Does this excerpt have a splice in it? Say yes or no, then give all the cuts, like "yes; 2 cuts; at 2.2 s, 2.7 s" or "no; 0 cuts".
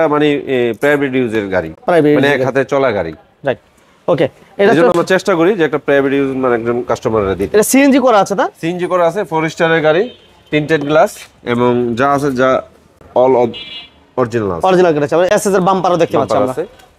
no; 0 cuts